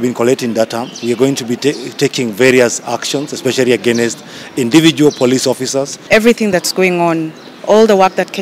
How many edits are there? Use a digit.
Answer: 1